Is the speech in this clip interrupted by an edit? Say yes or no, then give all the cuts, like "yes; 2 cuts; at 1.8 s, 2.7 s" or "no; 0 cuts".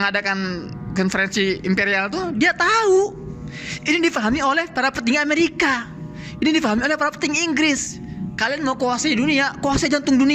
no; 0 cuts